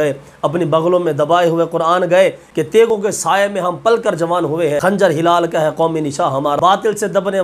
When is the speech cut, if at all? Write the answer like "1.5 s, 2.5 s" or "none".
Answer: 2.8 s, 4.8 s, 6.6 s